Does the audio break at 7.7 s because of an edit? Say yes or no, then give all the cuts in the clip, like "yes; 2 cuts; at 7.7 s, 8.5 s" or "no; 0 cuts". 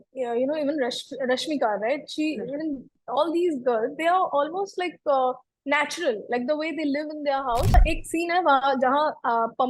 yes; 1 cut; at 7.7 s